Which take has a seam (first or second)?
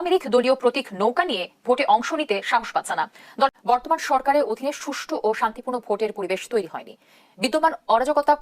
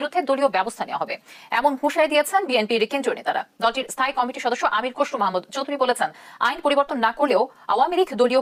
first